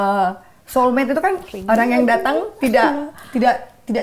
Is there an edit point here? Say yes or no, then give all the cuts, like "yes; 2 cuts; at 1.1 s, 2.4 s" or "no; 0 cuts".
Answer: no; 0 cuts